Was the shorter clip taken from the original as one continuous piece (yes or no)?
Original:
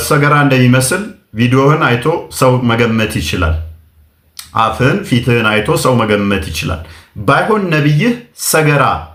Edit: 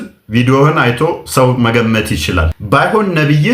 no